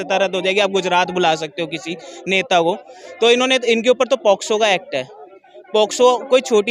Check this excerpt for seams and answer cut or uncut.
uncut